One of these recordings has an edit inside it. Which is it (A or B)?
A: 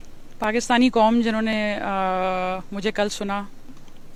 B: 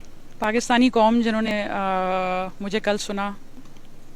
B